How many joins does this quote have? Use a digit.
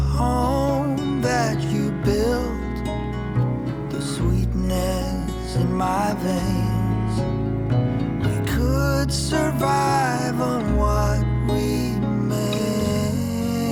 0